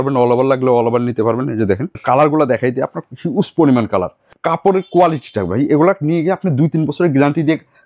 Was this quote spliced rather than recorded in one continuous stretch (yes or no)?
yes